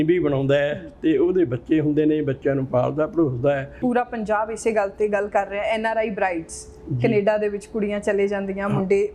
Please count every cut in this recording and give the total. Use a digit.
1